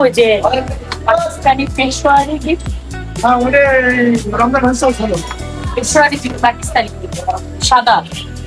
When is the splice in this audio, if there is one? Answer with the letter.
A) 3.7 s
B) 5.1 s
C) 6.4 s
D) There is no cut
D